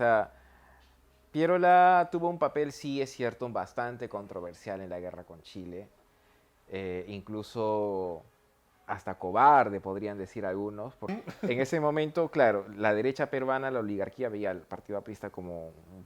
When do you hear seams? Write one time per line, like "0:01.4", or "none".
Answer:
0:11.1